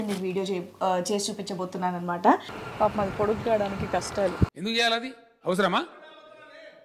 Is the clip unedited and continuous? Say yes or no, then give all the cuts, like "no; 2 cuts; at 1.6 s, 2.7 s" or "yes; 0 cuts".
no; 1 cut; at 2.5 s